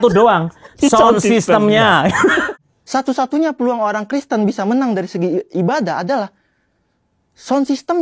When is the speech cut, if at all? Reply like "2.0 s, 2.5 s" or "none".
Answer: 2.5 s